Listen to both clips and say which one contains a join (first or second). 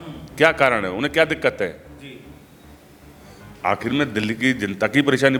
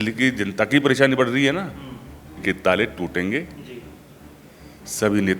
second